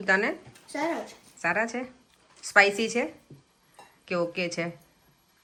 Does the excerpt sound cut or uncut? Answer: uncut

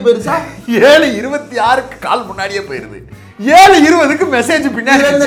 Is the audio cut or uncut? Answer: uncut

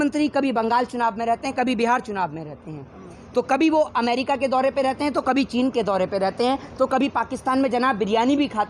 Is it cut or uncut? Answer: uncut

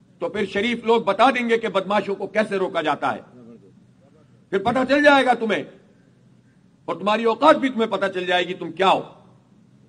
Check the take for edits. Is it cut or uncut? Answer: uncut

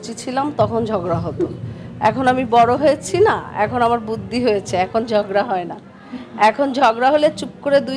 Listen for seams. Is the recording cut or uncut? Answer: uncut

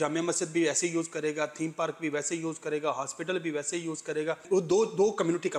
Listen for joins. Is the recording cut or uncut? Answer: cut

